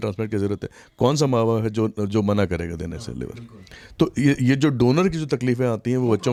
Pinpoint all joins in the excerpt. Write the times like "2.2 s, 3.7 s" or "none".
none